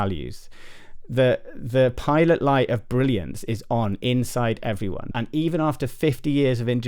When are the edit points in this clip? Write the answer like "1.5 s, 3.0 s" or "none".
5.1 s